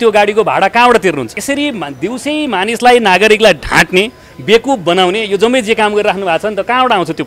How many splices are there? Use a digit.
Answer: 1